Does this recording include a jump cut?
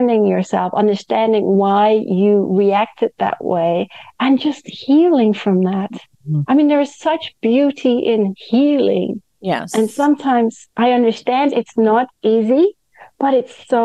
no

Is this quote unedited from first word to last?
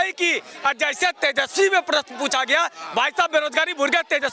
yes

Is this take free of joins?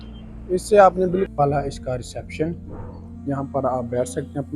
no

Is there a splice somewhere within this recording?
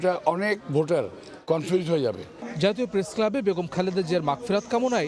no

